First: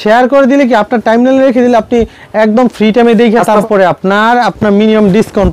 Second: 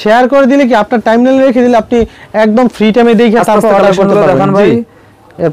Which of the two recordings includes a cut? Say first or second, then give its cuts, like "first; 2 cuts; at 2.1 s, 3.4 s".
first; 1 cut; at 3.6 s